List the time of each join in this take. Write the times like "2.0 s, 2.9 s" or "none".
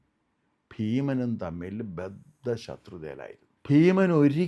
3.5 s